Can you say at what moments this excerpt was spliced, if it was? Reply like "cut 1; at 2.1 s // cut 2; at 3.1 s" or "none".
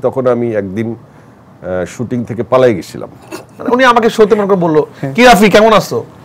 cut 1; at 3.6 s